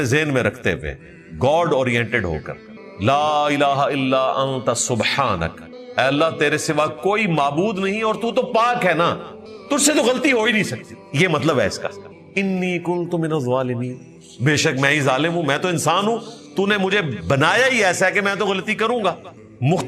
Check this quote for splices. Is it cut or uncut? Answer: uncut